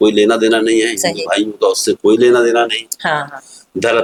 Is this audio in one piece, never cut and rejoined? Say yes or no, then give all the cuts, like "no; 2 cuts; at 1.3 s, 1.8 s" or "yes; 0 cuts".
yes; 0 cuts